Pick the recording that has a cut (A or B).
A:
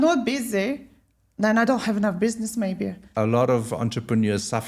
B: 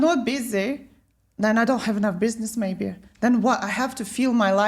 A